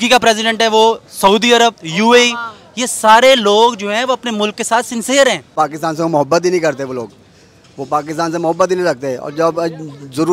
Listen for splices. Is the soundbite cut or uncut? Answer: cut